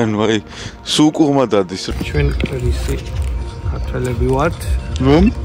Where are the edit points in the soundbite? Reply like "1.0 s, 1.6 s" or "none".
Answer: 1.8 s